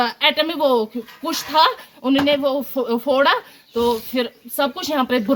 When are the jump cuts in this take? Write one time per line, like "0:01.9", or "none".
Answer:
none